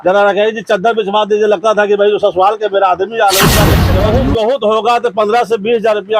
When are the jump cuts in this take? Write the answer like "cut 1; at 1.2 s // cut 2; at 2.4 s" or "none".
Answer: cut 1; at 3.8 s